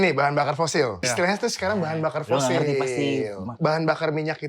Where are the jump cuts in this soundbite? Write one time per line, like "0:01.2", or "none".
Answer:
0:01.1
0:03.5